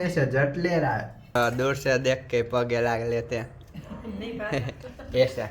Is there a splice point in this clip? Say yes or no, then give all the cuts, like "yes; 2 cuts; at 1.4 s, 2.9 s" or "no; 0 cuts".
yes; 1 cut; at 1.4 s